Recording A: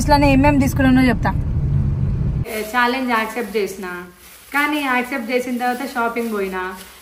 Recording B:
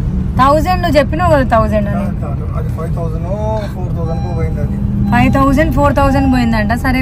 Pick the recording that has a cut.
A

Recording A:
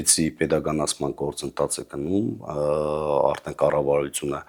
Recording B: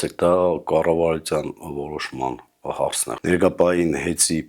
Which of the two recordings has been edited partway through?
B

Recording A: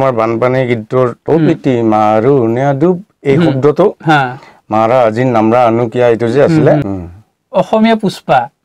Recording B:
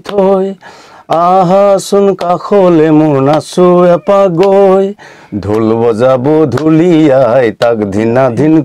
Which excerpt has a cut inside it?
A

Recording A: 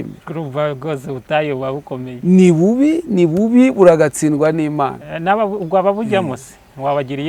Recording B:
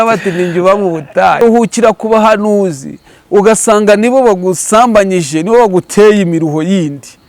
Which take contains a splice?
B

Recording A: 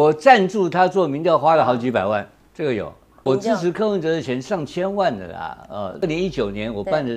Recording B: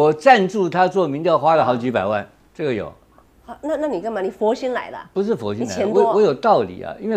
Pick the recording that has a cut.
A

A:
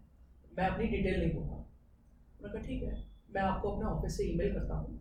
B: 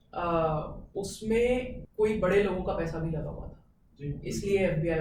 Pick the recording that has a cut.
B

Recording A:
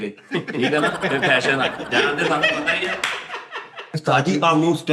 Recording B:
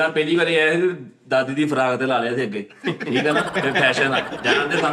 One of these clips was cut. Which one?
A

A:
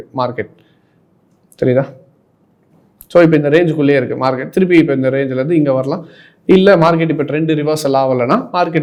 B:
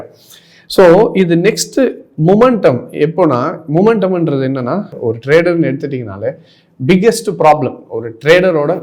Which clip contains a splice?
B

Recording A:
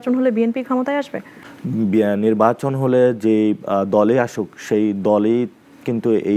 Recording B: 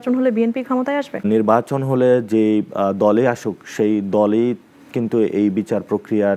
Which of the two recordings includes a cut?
B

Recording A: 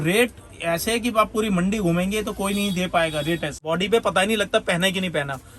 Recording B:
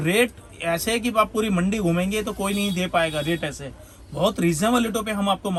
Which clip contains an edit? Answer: A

